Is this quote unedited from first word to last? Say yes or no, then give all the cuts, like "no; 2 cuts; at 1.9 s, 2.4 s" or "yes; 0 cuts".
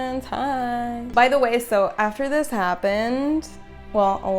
no; 1 cut; at 1.0 s